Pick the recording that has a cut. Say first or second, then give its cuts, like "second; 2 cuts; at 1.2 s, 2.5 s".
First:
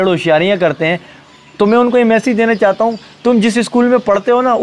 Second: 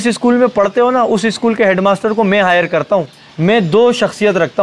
second; 1 cut; at 3.2 s